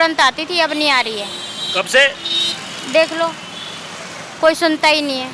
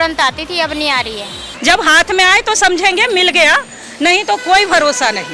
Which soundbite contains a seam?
second; 1 cut; at 1.4 s

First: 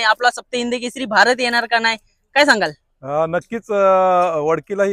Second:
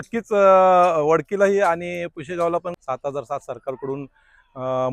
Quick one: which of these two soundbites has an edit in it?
second; 1 cut; at 2.7 s

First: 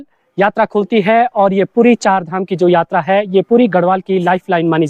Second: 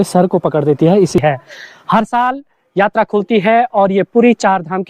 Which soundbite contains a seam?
second; 1 cut; at 1.2 s

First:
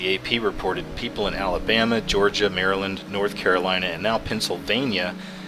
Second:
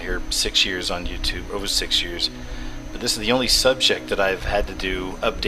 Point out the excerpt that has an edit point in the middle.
first; 1 cut; at 3.0 s

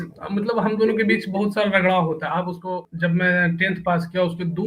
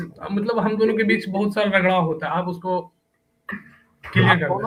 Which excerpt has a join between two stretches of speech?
first; 1 cut; at 2.9 s

